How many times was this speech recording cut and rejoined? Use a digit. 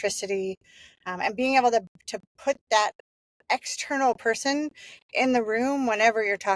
0